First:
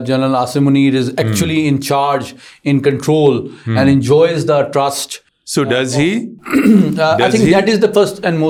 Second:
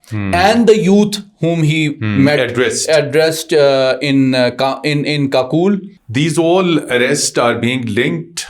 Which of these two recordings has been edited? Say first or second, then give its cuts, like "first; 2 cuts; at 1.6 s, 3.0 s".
second; 1 cut; at 6.0 s